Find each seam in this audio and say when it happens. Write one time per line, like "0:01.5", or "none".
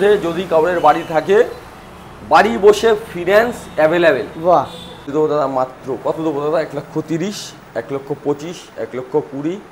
0:05.1